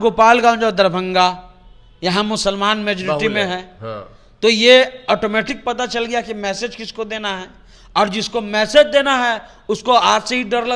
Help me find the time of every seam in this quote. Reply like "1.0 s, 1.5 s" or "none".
none

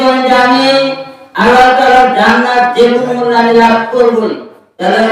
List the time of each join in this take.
4.2 s

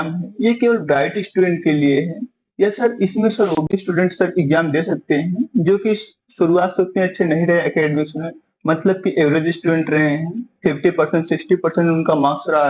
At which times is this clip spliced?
none

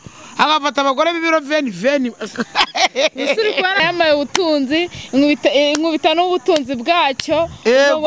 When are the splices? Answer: 3.8 s

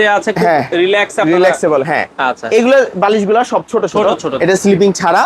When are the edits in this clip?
4.3 s

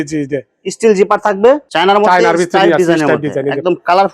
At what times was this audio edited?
1.6 s

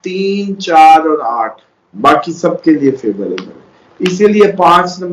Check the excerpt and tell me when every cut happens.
1.9 s

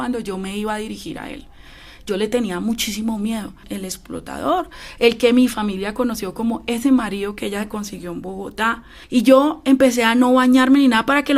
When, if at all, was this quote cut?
3.7 s, 8.9 s

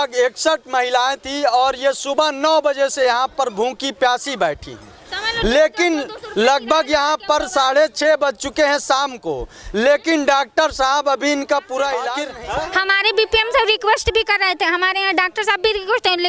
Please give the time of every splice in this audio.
12.3 s

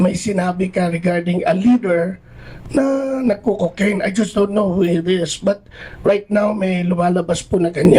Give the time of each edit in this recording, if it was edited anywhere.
none

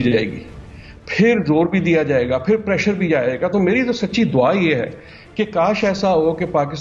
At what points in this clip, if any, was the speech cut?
none

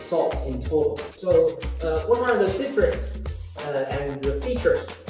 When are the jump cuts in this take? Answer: 1.2 s

